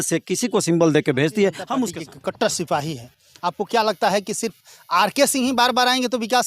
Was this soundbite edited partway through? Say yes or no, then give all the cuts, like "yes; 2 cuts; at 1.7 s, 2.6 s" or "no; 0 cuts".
yes; 1 cut; at 2.0 s